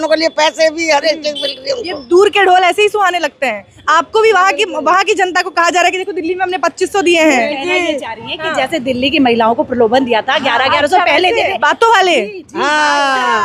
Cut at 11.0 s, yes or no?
no